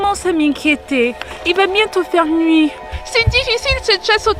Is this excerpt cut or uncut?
uncut